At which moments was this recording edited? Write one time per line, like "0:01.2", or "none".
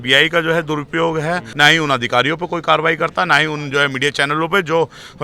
0:01.5